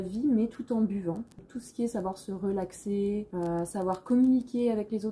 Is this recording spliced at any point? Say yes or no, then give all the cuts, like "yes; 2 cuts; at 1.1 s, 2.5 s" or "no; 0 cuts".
no; 0 cuts